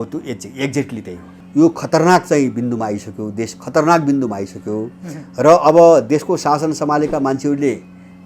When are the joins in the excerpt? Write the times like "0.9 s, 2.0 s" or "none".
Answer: 1.4 s